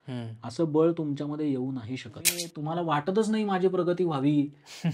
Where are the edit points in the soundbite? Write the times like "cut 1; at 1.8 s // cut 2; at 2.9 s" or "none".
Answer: cut 1; at 2.5 s